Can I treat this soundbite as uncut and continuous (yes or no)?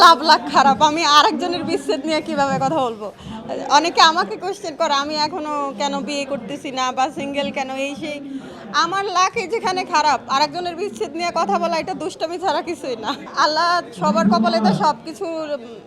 yes